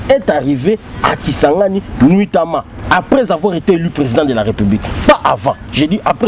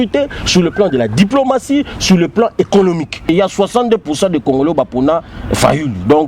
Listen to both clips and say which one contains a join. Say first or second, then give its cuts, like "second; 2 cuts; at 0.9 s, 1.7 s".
second; 1 cut; at 3.3 s